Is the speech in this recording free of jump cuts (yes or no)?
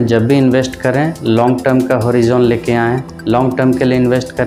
yes